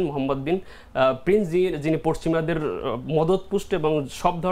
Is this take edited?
no; 0 cuts

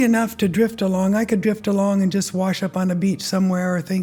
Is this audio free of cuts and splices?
yes; 0 cuts

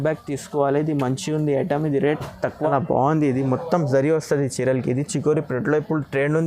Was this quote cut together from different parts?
yes; 1 cut; at 2.6 s

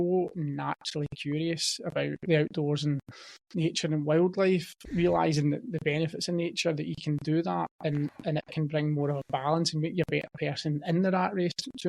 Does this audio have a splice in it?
yes; 1 cut; at 4.8 s

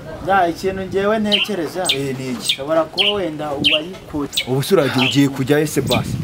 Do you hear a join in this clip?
yes; 1 cut; at 4.3 s

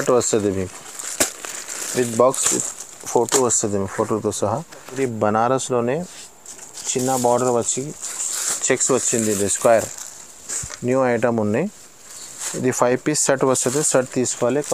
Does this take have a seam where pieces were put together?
yes; 1 cut; at 5.0 s

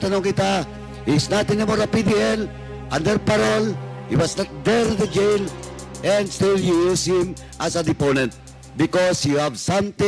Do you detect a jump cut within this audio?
no; 0 cuts

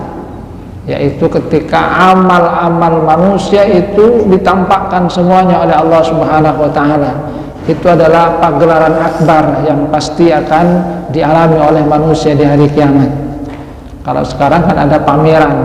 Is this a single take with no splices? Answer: yes; 0 cuts

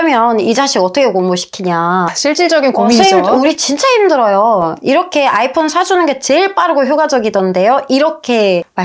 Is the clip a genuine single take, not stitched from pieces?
yes; 0 cuts

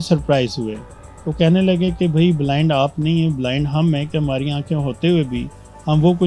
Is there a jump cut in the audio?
no; 0 cuts

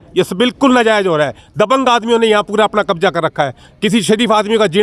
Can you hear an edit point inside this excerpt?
no; 0 cuts

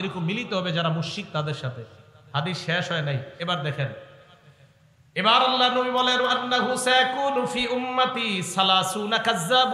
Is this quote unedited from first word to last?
yes; 0 cuts

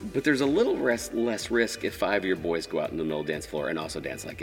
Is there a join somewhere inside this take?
no; 0 cuts

